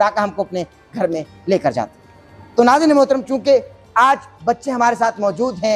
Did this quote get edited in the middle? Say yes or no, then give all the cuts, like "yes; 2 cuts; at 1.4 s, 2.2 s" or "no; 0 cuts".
no; 0 cuts